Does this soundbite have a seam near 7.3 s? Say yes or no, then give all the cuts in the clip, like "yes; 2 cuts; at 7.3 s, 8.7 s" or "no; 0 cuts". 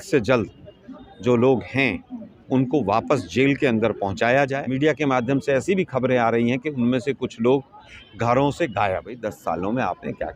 no; 2 cuts; at 4.6 s, 9.3 s